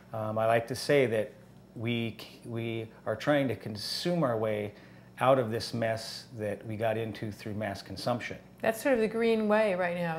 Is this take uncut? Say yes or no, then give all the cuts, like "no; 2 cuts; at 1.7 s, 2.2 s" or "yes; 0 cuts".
yes; 0 cuts